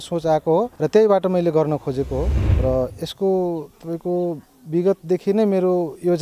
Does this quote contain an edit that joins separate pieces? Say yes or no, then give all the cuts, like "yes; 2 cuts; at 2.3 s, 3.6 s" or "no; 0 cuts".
yes; 1 cut; at 2.4 s